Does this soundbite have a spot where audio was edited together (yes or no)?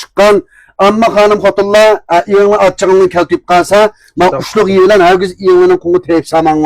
no